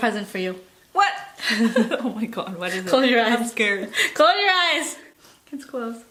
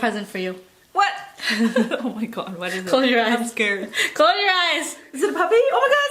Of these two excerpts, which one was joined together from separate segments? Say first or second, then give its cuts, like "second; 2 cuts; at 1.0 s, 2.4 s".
second; 1 cut; at 5.1 s